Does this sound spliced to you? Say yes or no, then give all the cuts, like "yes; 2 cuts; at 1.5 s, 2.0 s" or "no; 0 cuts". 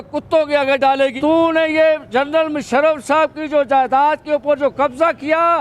yes; 1 cut; at 1.2 s